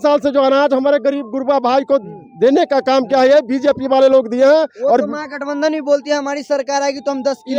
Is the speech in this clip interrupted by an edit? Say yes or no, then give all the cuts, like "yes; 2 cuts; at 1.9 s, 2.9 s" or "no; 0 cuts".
no; 0 cuts